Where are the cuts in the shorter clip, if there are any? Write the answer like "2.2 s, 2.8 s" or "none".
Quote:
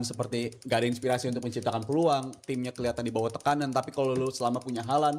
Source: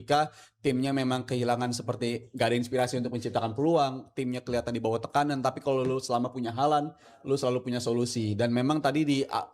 none

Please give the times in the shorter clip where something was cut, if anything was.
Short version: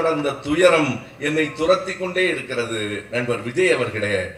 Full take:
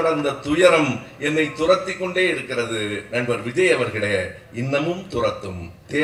none

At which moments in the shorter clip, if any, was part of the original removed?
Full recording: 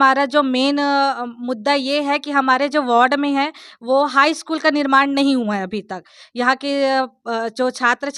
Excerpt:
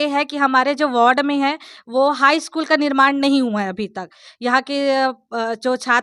none

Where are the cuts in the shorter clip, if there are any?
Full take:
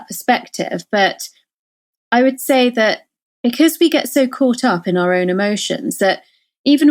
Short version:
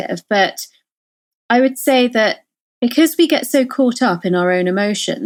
none

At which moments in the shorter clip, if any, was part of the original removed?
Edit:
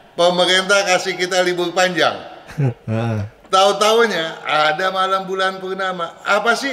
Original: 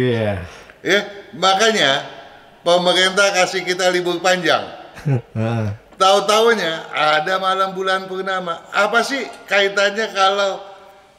none

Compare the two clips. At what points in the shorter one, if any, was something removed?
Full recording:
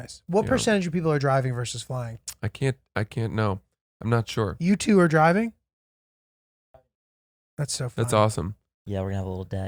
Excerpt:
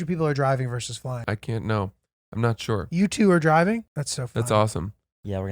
1.2 s, 4.0 s

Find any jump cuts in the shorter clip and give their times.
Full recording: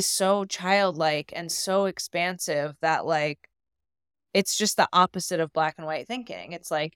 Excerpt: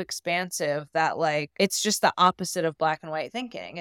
1.5 s

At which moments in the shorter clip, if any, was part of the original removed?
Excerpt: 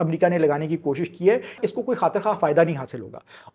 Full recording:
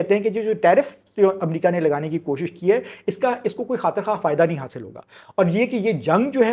1.6 s

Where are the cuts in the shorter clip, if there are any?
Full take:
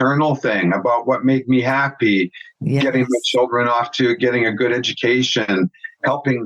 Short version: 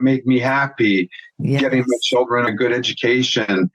2.5 s

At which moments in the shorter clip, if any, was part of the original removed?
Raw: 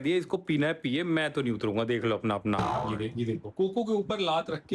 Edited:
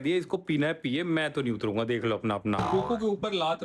2.7 s

